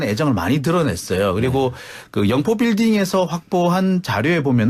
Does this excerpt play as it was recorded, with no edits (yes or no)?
yes